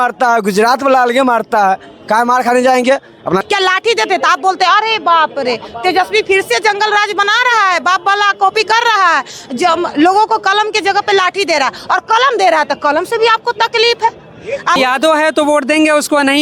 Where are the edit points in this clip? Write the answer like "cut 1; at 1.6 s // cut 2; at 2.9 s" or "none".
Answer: cut 1; at 3.4 s // cut 2; at 14.7 s

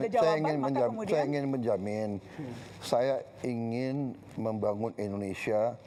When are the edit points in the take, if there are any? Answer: none

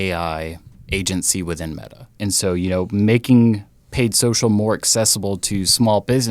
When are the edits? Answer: cut 1; at 2.1 s

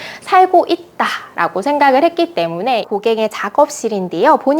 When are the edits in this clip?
cut 1; at 2.8 s

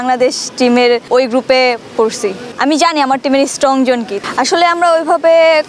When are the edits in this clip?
cut 1; at 1.1 s // cut 2; at 2.5 s // cut 3; at 4.2 s

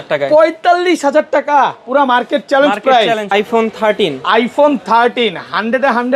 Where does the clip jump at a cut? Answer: cut 1; at 3.3 s

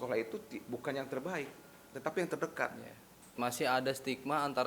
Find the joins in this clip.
cut 1; at 3.4 s

